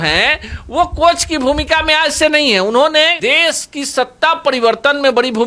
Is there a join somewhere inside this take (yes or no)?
yes